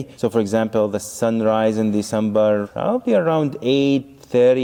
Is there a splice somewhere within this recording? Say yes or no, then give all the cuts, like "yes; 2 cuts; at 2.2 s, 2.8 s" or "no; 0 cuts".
no; 0 cuts